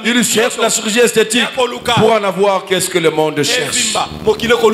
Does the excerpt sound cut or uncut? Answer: uncut